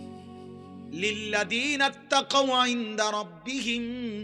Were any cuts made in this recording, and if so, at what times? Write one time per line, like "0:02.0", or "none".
0:00.9